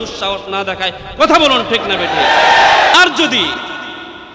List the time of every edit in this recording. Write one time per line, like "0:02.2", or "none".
0:02.9